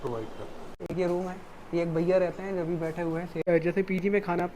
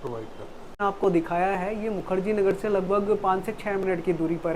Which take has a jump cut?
first; 2 cuts; at 0.8 s, 3.4 s

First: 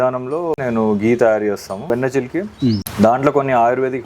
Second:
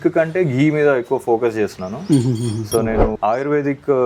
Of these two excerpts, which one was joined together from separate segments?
first; 1 cut; at 1.9 s

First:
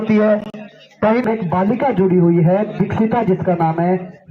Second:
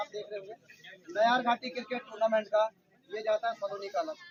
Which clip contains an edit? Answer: first; 1 cut; at 1.1 s

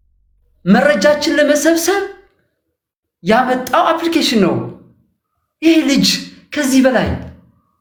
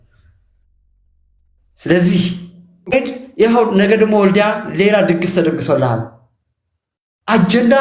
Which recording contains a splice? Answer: second; 1 cut; at 2.9 s

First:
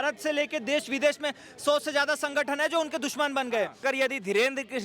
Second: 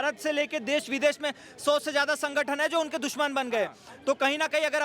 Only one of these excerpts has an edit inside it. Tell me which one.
first; 1 cut; at 3.8 s

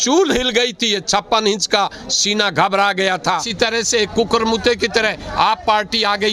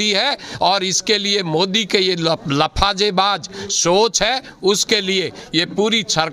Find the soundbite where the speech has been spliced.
first; 1 cut; at 3.2 s

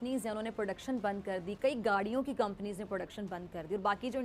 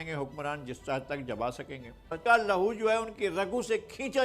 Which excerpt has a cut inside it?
second; 1 cut; at 2.2 s

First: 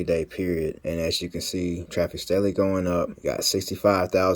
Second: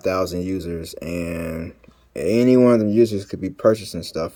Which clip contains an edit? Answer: first; 3 cuts; at 0.8 s, 1.8 s, 3.1 s

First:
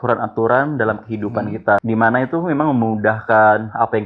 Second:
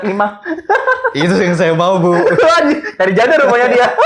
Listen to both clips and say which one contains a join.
first; 1 cut; at 1.8 s

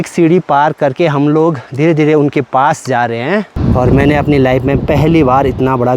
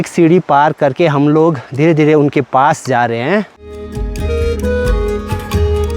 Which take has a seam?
first; 1 cut; at 3.6 s

